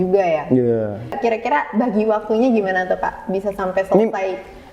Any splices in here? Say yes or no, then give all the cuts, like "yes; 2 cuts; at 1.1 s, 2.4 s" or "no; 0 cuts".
yes; 1 cut; at 1.2 s